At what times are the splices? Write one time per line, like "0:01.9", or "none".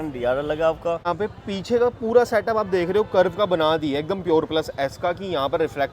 0:01.1